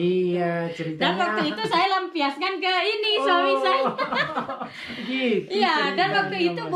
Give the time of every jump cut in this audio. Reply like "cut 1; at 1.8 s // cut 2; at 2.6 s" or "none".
none